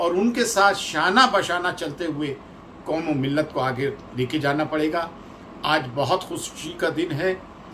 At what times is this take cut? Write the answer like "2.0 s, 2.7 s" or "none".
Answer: none